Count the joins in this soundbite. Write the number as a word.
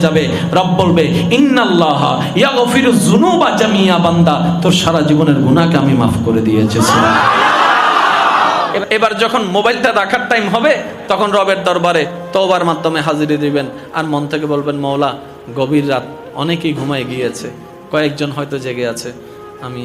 one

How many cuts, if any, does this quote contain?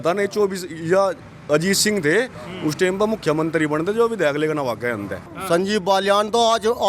one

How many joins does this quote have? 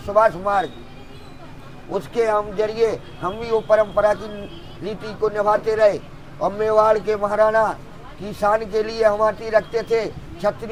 zero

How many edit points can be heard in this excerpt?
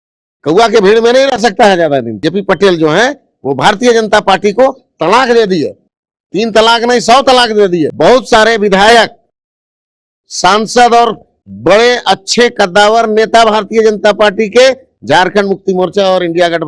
two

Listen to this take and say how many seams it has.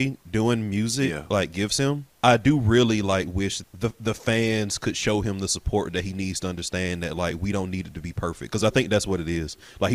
two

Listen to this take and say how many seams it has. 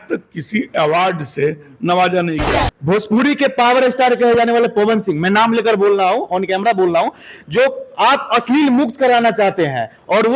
one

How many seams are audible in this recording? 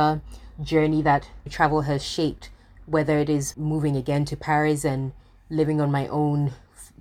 one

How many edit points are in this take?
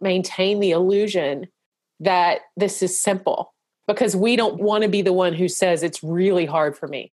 two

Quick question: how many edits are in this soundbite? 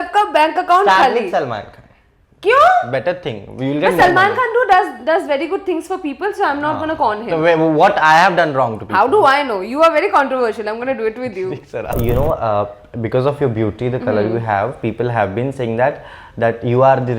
one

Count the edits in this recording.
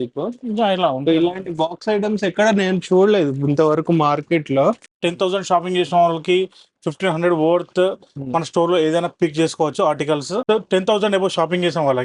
two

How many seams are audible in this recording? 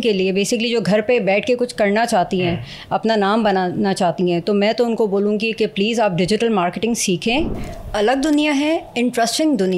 one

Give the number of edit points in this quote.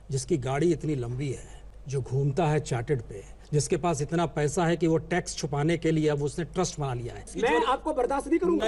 two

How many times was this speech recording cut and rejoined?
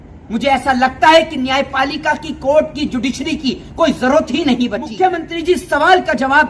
one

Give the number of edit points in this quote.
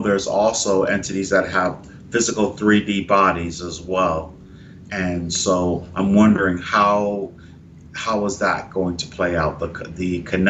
one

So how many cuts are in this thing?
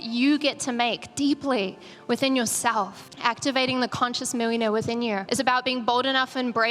two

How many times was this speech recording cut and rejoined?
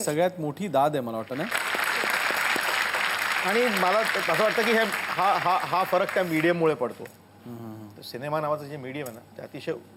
zero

